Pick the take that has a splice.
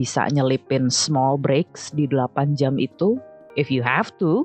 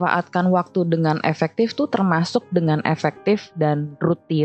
first; 1 cut; at 3.4 s

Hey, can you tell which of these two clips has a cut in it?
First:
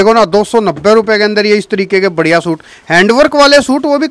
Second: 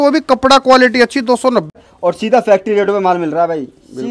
second; 1 cut; at 1.7 s

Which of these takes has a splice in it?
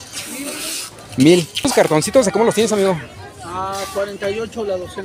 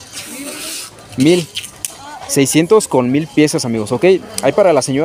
first; 1 cut; at 1.7 s

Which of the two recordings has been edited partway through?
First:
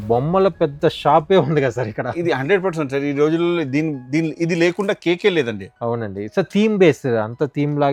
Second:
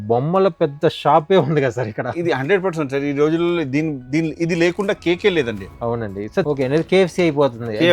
second; 1 cut; at 6.5 s

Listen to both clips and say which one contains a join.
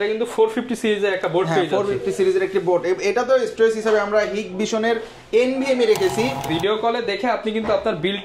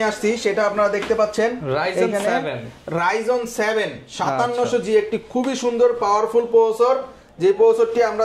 first; 1 cut; at 6.5 s

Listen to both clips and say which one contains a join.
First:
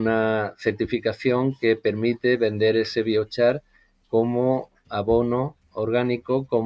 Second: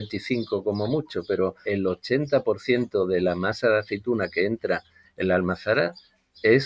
second; 1 cut; at 1.6 s

